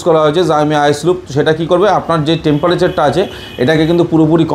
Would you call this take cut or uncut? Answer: uncut